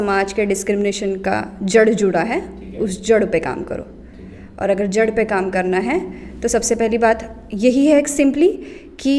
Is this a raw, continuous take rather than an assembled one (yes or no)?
yes